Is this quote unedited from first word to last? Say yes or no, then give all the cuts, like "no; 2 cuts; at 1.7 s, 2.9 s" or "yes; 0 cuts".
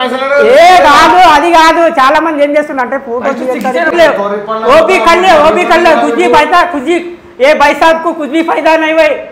no; 1 cut; at 3.9 s